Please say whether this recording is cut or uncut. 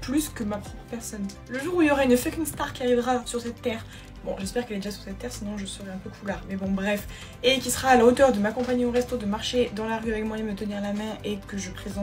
cut